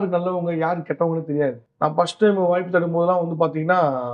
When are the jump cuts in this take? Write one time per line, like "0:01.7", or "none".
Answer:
0:01.7